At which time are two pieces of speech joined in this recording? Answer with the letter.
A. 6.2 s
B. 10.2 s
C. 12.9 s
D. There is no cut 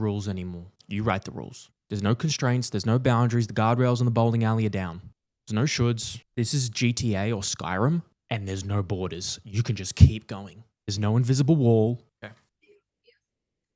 C